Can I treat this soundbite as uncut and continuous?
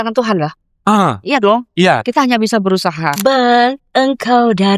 no; 1 cut; at 3.1 s

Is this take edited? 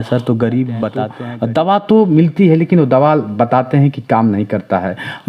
yes; 1 cut; at 1.2 s

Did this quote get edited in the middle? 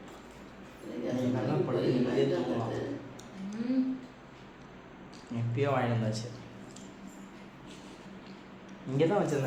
no; 0 cuts

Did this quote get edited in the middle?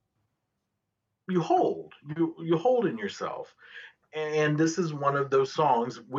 no; 0 cuts

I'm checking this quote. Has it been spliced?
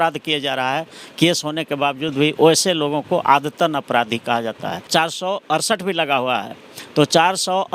yes; 1 cut; at 4.9 s

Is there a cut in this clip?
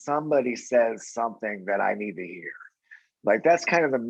no; 0 cuts

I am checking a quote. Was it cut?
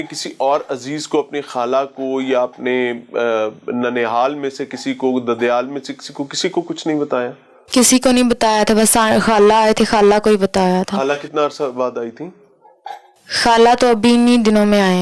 no; 0 cuts

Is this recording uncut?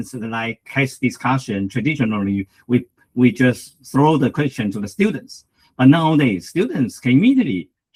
yes; 0 cuts

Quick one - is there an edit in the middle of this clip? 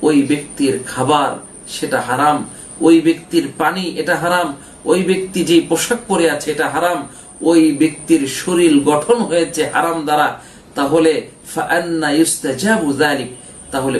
no; 0 cuts

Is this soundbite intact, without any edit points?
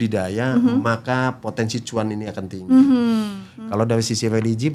no; 1 cut; at 3.4 s

